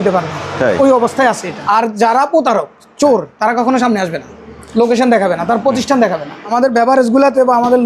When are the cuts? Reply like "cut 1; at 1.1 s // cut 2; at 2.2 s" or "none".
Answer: cut 1; at 1.5 s // cut 2; at 6.4 s